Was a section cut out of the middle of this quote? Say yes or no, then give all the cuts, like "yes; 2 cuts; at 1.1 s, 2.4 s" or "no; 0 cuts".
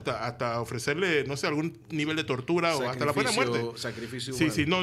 no; 0 cuts